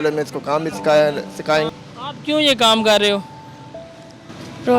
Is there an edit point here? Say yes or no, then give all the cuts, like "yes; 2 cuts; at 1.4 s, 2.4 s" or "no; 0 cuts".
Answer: yes; 1 cut; at 1.7 s